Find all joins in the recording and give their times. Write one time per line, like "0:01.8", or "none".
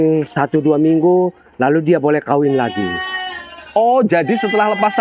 none